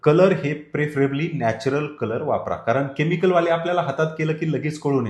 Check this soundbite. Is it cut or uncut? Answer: uncut